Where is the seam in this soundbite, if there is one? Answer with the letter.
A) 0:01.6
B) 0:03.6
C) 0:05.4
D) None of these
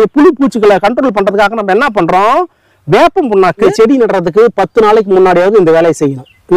B